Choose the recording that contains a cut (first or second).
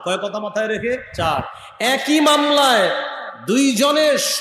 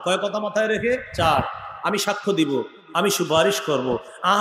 first